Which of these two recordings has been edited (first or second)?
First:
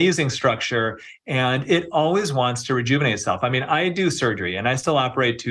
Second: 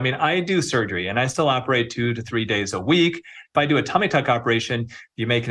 second